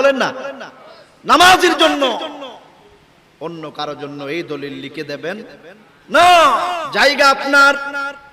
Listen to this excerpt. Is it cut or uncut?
cut